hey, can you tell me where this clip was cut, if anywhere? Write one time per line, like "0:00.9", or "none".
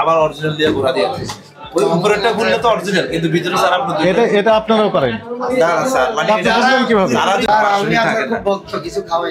0:07.5

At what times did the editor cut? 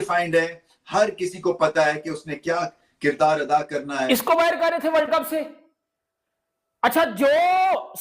0:03.9

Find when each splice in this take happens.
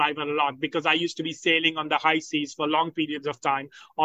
none

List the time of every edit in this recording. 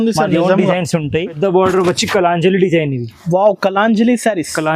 0:01.3

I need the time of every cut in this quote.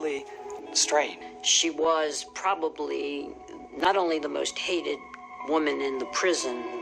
0:01.3

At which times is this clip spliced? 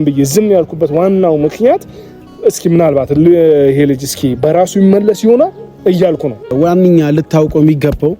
0:06.5

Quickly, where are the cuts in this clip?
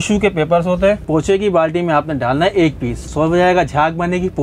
0:01.0
0:03.1

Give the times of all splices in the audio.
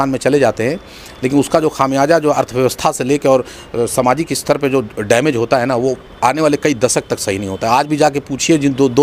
none

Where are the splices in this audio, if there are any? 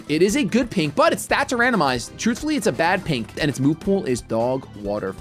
0:02.1
0:03.4

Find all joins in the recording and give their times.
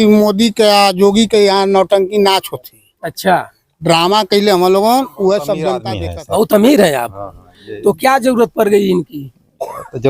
0:05.9

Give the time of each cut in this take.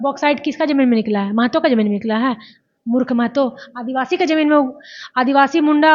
none

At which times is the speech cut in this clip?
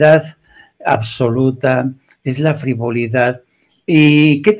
none

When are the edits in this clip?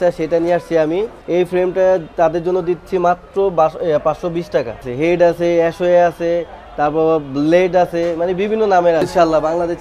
0:01.2
0:04.9
0:09.0

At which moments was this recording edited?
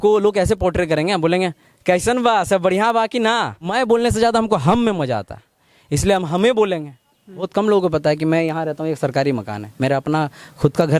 0:03.7
0:07.5

